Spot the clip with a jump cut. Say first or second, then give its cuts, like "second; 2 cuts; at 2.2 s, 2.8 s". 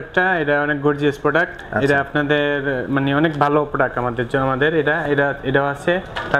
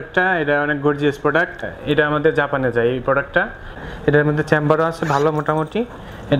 second; 2 cuts; at 1.7 s, 3.7 s